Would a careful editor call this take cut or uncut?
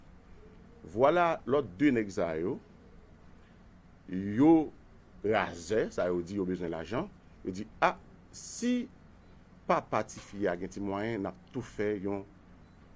cut